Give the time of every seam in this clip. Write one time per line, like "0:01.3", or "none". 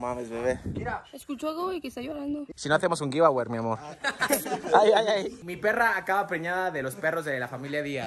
0:02.5
0:05.4